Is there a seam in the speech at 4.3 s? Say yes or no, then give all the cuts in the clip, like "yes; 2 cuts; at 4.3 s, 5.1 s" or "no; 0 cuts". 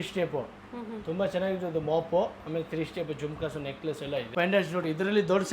yes; 1 cut; at 4.3 s